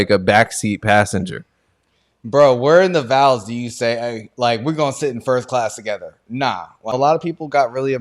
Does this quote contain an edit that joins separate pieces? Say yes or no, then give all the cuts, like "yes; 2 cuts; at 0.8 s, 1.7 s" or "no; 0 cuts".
yes; 1 cut; at 6.9 s